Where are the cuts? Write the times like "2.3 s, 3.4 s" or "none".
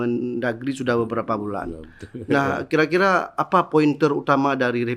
none